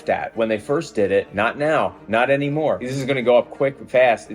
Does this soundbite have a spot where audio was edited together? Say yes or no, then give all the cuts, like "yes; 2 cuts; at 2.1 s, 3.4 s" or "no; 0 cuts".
yes; 2 cuts; at 1.3 s, 2.9 s